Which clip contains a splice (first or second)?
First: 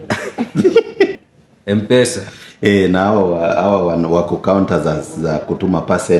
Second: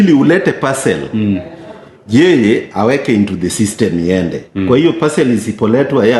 first